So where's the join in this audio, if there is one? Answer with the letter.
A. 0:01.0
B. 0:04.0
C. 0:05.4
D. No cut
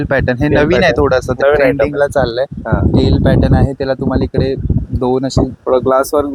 D